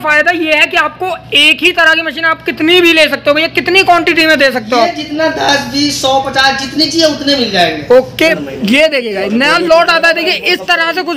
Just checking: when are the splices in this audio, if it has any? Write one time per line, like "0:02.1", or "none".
0:08.2